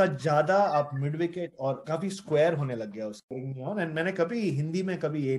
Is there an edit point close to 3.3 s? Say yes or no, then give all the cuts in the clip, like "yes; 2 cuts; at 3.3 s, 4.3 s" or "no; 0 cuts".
yes; 1 cut; at 3.3 s